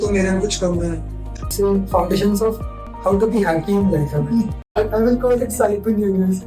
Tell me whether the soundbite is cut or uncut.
cut